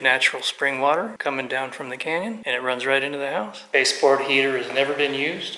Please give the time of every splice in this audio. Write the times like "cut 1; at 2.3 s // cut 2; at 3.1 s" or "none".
cut 1; at 1.2 s // cut 2; at 2.4 s // cut 3; at 3.6 s